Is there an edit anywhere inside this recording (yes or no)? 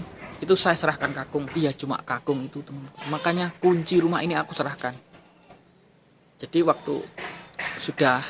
yes